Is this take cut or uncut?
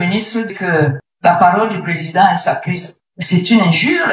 uncut